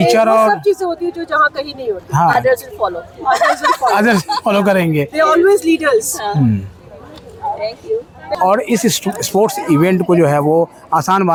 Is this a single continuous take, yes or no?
yes